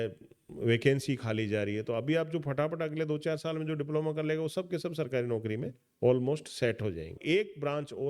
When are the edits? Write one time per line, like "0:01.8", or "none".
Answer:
0:07.2